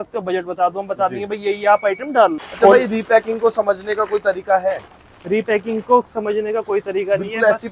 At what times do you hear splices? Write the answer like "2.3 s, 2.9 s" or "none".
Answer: 2.4 s